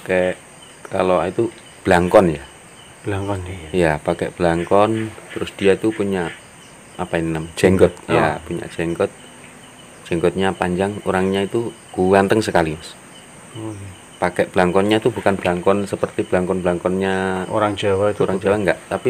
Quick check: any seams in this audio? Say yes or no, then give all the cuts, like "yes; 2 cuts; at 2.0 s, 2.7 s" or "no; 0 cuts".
no; 0 cuts